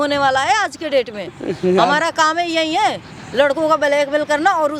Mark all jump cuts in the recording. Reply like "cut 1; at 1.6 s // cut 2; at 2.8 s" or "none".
none